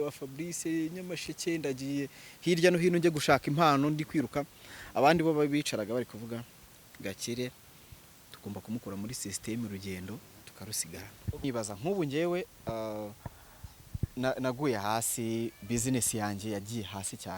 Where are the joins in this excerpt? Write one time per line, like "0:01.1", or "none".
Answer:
0:11.4